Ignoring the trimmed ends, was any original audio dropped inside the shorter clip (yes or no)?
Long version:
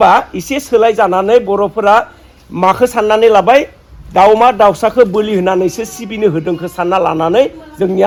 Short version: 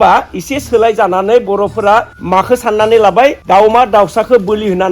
yes